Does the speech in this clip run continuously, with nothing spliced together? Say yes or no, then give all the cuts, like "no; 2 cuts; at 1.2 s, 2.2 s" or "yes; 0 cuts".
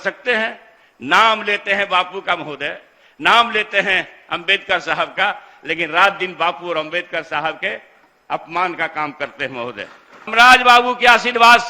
no; 1 cut; at 10.3 s